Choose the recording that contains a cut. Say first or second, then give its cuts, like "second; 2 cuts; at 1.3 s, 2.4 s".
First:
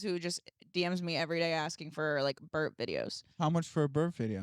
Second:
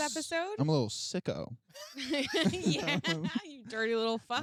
first; 1 cut; at 3.3 s